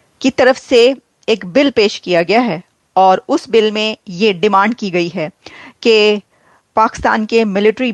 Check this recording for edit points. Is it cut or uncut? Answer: uncut